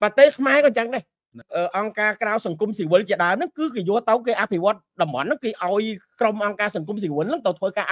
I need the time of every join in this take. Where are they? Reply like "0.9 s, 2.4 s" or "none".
1.4 s